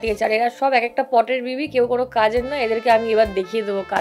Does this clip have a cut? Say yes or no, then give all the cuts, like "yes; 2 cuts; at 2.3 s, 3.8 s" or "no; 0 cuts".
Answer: no; 0 cuts